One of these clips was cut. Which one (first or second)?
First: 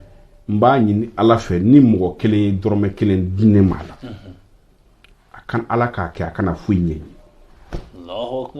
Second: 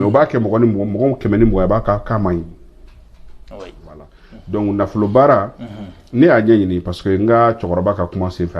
second